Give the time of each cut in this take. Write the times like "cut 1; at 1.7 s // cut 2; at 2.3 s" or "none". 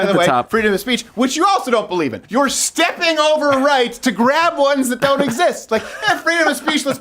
cut 1; at 2.2 s